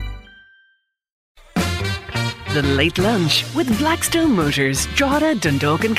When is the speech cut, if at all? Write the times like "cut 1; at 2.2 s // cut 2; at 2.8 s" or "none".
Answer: cut 1; at 1.1 s